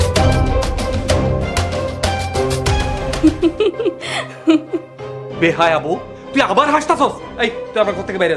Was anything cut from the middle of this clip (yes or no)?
yes